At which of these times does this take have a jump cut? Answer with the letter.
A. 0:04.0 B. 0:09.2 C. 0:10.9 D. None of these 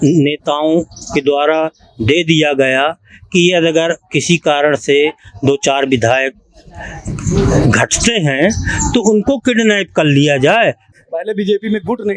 C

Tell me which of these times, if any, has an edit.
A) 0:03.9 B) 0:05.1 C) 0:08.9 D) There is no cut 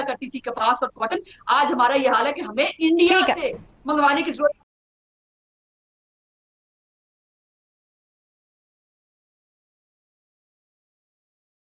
D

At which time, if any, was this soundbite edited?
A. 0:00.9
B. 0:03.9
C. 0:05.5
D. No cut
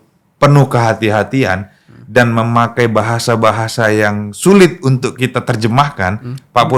D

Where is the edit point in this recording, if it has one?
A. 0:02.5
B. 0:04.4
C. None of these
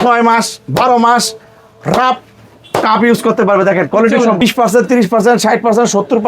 B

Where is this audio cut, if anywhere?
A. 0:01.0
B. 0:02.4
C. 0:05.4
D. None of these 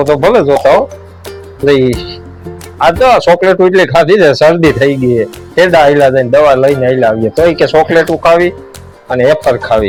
D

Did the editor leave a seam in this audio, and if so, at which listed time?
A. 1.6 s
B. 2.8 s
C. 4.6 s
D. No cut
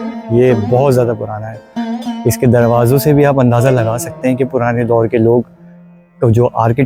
D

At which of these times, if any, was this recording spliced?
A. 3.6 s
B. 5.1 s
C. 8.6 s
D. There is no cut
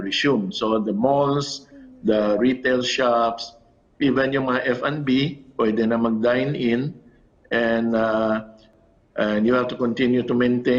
C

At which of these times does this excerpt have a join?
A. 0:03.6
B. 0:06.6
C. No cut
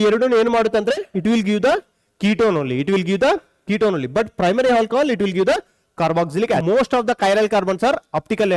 B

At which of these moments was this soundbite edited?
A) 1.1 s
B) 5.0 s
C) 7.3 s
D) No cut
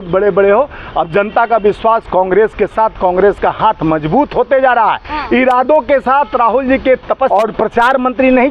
C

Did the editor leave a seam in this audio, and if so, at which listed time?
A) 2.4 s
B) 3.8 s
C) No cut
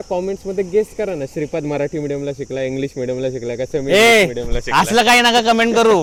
C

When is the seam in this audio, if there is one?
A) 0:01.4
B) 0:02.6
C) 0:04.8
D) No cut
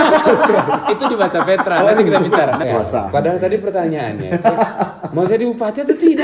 B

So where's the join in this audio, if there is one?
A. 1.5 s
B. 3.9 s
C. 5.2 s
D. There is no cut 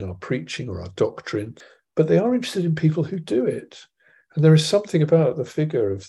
A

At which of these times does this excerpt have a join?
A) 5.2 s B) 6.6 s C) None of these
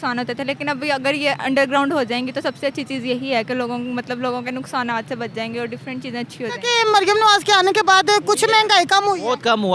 B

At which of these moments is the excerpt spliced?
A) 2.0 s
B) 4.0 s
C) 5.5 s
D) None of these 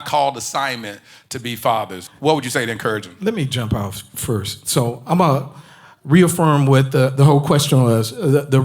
A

